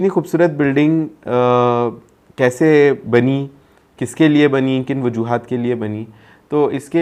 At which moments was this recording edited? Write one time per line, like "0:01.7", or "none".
none